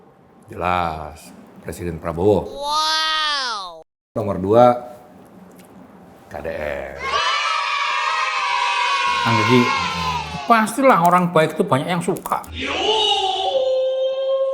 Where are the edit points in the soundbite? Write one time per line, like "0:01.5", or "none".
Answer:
0:04.2